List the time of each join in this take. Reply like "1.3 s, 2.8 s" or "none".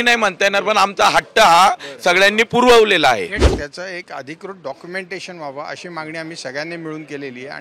3.4 s